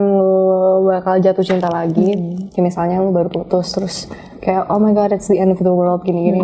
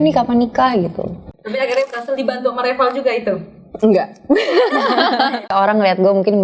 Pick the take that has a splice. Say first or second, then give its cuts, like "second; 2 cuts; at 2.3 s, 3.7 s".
second; 2 cuts; at 1.3 s, 5.5 s